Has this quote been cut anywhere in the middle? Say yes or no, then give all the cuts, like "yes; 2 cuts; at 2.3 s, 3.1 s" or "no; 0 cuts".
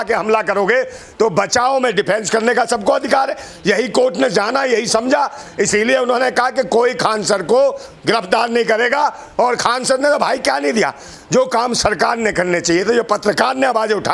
no; 0 cuts